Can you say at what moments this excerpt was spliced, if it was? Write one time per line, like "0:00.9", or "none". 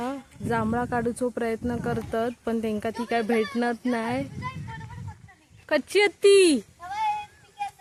none